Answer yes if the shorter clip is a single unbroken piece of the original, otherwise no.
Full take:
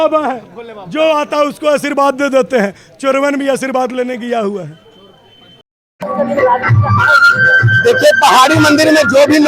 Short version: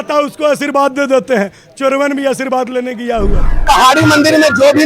no